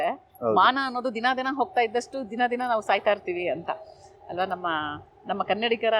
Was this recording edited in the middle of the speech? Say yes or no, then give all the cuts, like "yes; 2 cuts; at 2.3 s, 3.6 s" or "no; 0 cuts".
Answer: no; 0 cuts